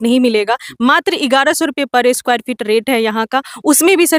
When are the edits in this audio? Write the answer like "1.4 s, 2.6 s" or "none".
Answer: none